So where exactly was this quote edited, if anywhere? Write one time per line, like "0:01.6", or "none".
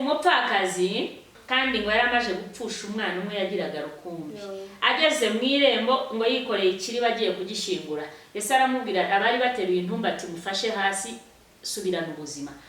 0:01.4